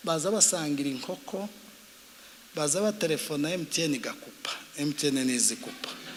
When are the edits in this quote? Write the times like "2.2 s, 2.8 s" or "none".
none